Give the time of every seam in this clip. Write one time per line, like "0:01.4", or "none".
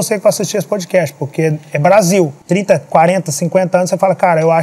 0:02.4

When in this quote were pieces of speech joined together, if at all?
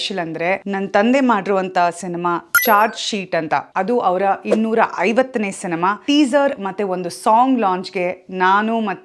0:06.0

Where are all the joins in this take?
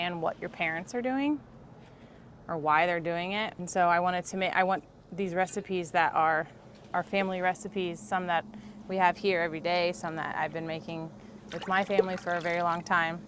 0:03.6

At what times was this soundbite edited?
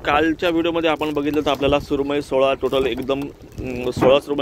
none

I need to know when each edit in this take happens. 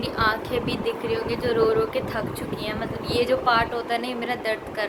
none

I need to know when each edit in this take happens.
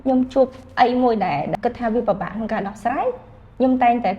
0:01.6

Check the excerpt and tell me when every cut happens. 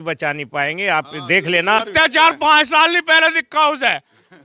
0:01.9

